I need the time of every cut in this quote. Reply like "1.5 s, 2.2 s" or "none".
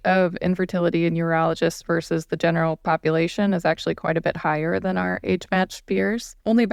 none